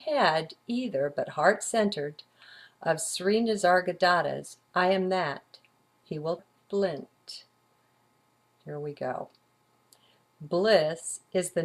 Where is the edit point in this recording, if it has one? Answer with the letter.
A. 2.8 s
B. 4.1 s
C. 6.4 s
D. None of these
D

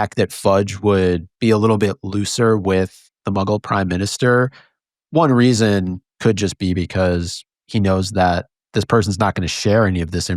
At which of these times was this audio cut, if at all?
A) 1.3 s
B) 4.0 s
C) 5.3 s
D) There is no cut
A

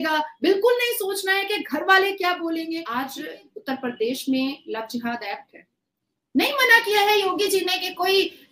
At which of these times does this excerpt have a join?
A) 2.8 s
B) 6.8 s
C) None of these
A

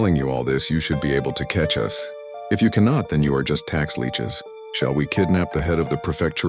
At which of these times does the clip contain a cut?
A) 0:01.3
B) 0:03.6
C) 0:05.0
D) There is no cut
D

